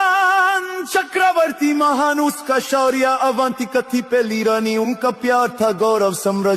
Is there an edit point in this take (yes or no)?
no